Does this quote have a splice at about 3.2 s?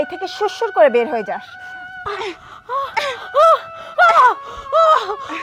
no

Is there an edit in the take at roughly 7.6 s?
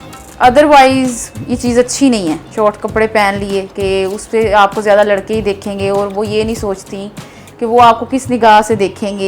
no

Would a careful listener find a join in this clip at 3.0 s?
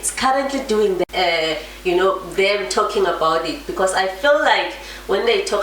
no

